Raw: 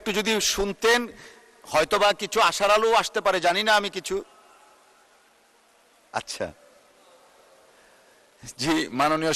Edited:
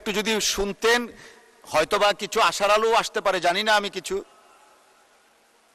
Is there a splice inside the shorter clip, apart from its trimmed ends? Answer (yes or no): no